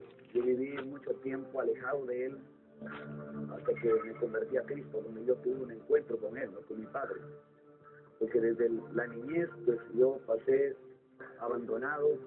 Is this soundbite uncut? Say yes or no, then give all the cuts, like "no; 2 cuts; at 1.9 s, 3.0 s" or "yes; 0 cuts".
yes; 0 cuts